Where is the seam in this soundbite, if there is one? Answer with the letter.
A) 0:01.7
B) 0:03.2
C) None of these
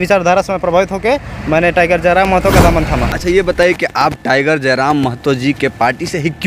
B